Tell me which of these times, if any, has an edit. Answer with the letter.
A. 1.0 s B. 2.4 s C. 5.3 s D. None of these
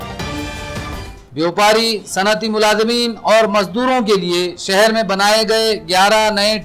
A